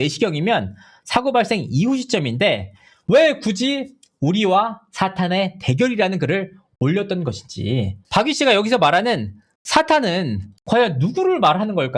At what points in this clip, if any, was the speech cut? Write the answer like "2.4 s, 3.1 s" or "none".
none